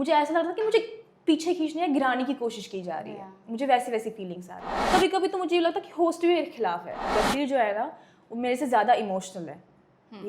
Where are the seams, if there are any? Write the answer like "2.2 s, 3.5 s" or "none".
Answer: 4.7 s, 7.1 s

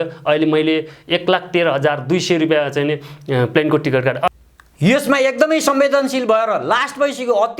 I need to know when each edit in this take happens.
4.3 s

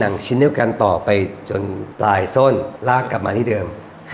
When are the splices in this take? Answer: 1.8 s, 2.7 s

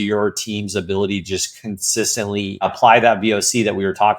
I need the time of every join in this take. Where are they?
2.7 s

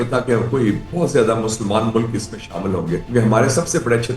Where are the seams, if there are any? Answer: 3.0 s

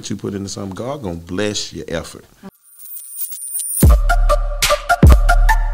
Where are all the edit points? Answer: 2.6 s

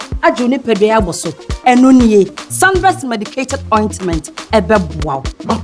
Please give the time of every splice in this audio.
none

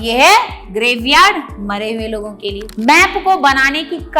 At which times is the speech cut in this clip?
2.7 s

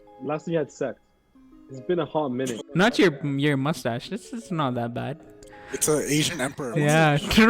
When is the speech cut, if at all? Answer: 2.6 s

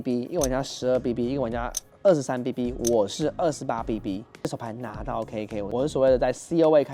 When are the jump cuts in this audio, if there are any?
4.5 s

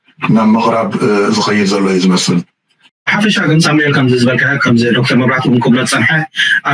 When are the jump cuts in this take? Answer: 2.6 s

